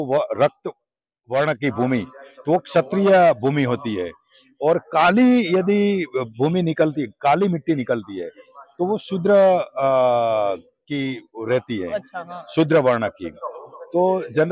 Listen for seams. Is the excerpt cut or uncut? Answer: uncut